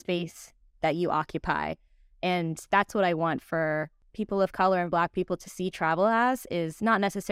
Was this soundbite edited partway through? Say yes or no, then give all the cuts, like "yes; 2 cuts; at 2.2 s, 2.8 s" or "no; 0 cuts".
yes; 1 cut; at 4.0 s